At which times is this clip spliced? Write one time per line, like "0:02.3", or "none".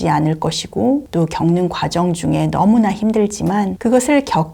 0:01.1
0:03.7